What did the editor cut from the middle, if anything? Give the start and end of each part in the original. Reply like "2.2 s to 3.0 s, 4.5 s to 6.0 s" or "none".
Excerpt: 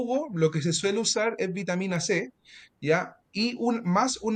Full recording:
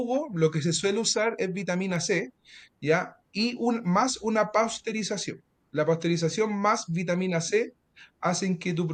none